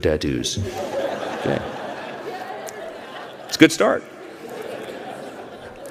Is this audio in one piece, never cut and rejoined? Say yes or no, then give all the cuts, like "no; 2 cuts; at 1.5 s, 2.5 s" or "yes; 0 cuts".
yes; 0 cuts